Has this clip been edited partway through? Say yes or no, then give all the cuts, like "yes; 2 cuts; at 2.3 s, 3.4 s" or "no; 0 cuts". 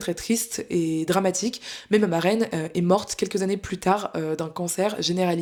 no; 0 cuts